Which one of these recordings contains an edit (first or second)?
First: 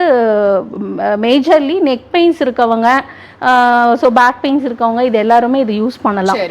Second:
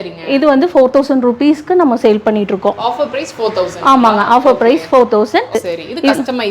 second